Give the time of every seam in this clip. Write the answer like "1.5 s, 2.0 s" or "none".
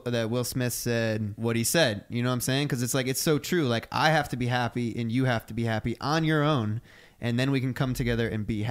1.3 s